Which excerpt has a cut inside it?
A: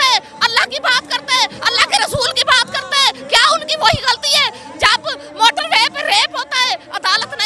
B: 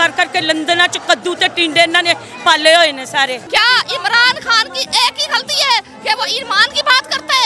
B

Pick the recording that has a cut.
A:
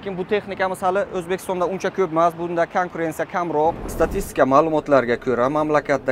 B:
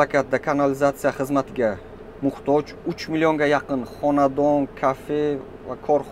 A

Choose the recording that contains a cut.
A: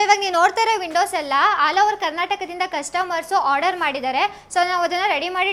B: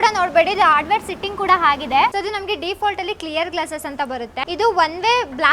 B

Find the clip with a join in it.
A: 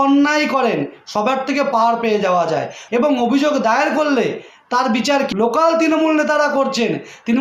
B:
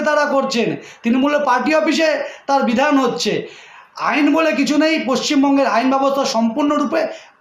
A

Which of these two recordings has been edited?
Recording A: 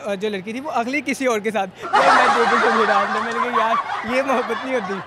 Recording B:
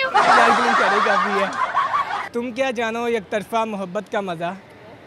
B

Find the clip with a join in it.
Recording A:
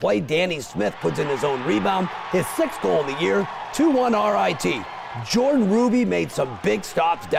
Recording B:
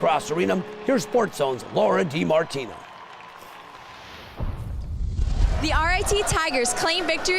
B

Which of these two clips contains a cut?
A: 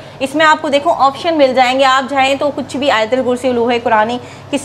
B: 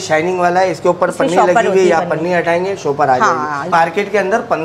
B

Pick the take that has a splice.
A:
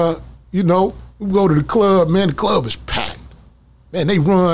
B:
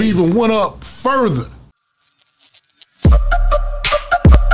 B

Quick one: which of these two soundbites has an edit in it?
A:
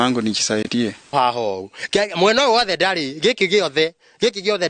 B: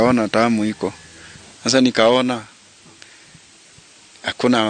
A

